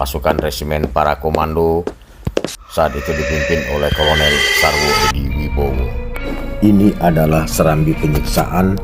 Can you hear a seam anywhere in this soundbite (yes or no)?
no